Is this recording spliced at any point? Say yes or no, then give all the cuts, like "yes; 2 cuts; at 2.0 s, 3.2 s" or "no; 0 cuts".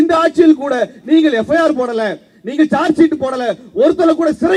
no; 0 cuts